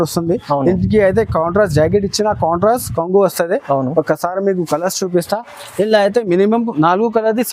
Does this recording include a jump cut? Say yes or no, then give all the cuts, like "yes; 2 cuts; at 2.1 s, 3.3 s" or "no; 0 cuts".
no; 0 cuts